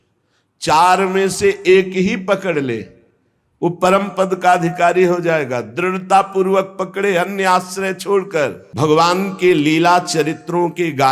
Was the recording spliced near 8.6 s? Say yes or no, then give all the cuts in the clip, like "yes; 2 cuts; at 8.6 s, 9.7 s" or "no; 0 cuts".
yes; 1 cut; at 8.6 s